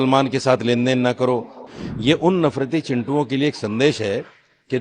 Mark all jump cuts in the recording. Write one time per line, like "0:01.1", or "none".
0:01.6